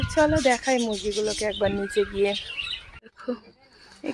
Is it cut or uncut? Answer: cut